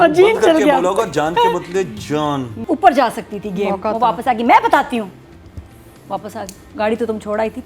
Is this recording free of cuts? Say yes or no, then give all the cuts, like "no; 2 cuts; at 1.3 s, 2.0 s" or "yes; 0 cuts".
no; 1 cut; at 2.5 s